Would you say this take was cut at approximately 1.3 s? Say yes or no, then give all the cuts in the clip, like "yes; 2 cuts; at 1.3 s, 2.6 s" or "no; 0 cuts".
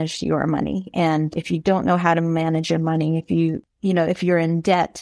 yes; 2 cuts; at 1.3 s, 3.6 s